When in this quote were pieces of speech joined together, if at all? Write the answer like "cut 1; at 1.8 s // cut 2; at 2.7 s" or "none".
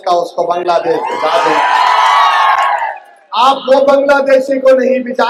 none